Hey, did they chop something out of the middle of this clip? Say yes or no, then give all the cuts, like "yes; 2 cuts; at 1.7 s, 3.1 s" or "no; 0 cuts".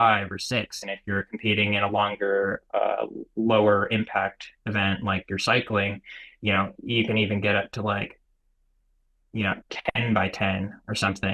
no; 0 cuts